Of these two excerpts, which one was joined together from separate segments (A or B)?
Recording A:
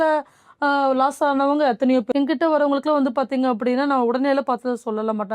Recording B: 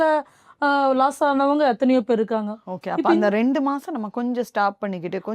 A